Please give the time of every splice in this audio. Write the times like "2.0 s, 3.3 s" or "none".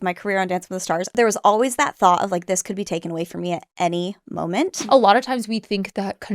1.1 s, 4.8 s